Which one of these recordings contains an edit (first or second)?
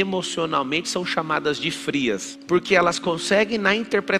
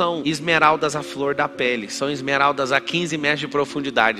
first